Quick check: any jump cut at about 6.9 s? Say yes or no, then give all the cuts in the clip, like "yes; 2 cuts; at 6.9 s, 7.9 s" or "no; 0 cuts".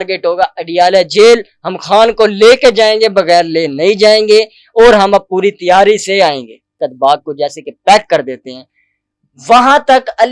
yes; 1 cut; at 6.9 s